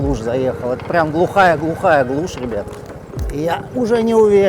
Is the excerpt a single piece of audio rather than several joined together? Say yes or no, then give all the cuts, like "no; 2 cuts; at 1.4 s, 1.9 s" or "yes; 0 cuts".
no; 1 cut; at 3.4 s